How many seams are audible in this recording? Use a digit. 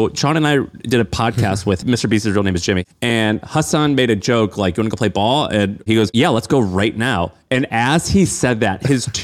3